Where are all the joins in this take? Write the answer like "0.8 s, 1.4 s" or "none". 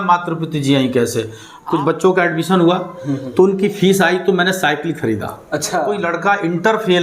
1.5 s, 6.0 s